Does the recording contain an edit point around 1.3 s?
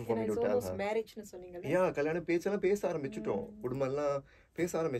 no; 0 cuts

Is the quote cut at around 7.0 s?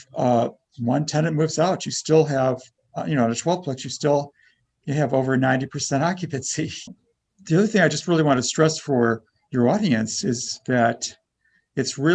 yes; 1 cut; at 7.0 s

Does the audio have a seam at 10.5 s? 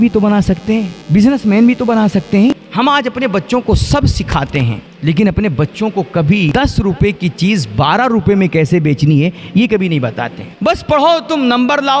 yes; 5 cuts; at 1.0 s, 2.5 s, 4.8 s, 6.5 s, 10.5 s

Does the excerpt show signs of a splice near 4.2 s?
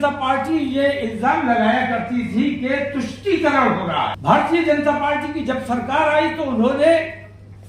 yes; 1 cut; at 4.2 s

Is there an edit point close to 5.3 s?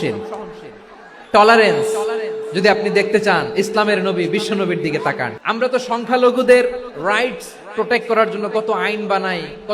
yes; 1 cut; at 5.3 s

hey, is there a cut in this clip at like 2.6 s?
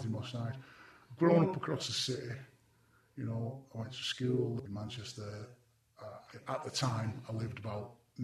no; 1 cut; at 4.6 s

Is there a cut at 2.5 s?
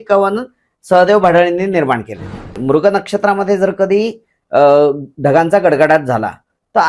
yes; 1 cut; at 2.5 s

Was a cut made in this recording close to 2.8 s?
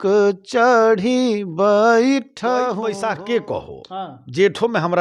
yes; 1 cut; at 2.8 s

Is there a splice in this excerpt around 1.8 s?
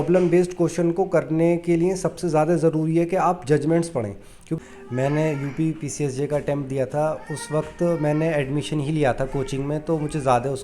no; 1 cut; at 4.6 s

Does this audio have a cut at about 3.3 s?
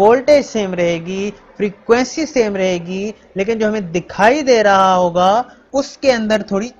no; 1 cut; at 5.6 s

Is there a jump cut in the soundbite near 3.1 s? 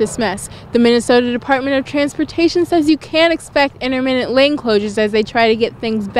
no; 0 cuts

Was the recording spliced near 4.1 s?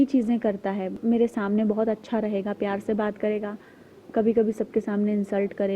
no; 1 cut; at 1.0 s

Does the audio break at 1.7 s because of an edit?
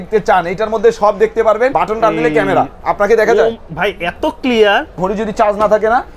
yes; 2 cuts; at 1.7 s, 5.0 s

